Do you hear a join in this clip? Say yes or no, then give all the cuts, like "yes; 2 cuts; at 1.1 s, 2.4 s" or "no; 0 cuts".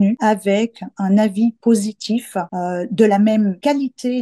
no; 0 cuts